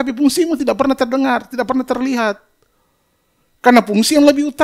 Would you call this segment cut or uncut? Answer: uncut